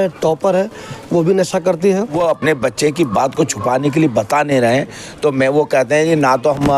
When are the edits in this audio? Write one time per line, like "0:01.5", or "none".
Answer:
0:02.2